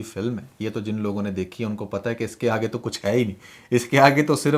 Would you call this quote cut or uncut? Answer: uncut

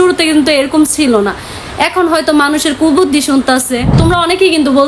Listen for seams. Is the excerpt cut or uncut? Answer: cut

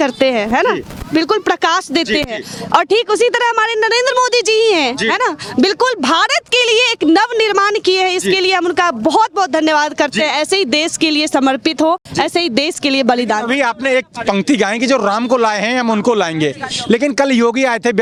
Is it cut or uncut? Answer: uncut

